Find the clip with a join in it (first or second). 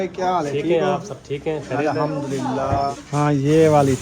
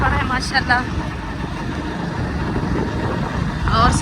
first